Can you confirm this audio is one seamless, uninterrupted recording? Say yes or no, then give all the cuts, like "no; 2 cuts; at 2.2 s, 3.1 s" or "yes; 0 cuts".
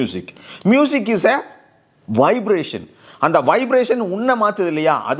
yes; 0 cuts